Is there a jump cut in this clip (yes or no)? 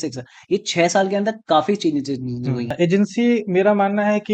yes